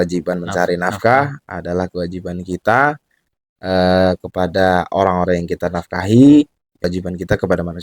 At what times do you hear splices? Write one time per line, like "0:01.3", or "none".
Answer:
0:06.9